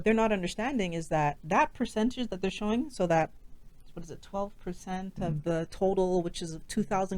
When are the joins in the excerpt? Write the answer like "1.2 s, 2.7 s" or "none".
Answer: 1.4 s